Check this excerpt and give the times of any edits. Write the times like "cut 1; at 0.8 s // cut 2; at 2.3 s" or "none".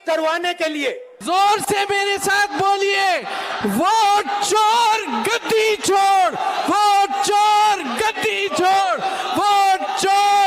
cut 1; at 1.1 s